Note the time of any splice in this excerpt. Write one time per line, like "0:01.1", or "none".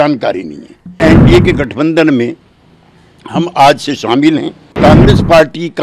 0:00.9
0:04.7